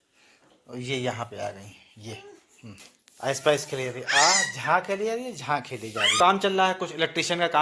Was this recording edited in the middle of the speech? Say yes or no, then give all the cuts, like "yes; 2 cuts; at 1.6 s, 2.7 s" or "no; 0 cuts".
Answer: yes; 2 cuts; at 2.9 s, 6.2 s